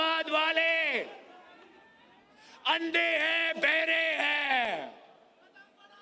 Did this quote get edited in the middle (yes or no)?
no